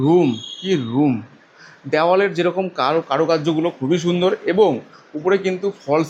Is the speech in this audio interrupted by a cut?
no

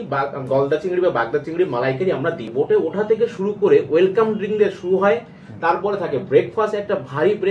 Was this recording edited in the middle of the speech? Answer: yes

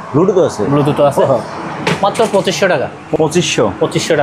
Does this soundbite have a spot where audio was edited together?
no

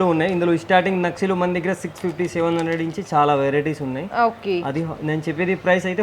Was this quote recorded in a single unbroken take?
yes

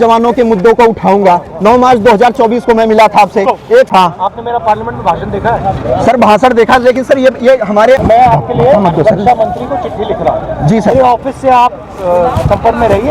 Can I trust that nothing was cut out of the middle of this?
no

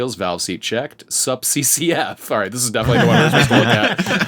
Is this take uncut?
yes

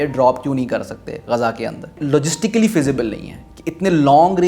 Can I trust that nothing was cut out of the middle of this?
no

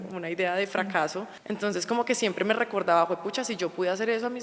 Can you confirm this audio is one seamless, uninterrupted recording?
no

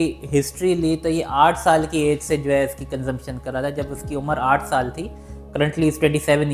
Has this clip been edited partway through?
no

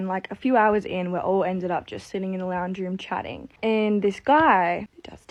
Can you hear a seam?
no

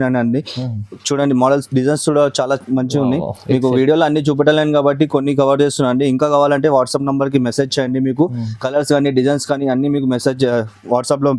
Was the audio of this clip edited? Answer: no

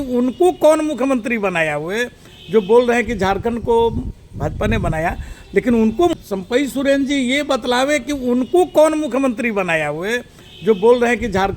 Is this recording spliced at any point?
yes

